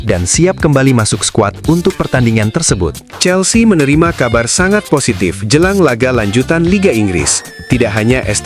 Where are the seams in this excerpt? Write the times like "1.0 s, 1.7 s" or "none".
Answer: 3.1 s